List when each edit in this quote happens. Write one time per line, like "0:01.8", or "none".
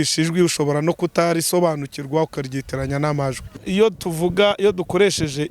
0:03.6